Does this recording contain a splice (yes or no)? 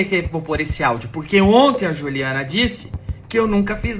no